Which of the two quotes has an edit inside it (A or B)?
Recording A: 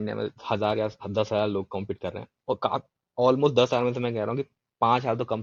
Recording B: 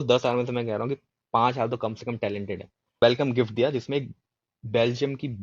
B